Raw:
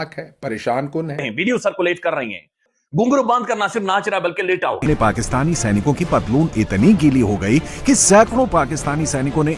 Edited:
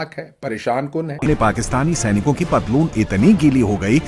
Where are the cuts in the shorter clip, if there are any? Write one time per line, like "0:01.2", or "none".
0:01.2